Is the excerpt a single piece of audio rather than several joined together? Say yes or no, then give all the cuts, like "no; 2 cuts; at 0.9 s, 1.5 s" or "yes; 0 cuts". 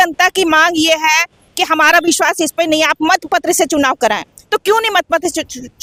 yes; 0 cuts